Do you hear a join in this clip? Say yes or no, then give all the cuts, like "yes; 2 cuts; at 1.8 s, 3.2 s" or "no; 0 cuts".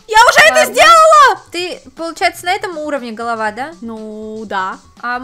no; 0 cuts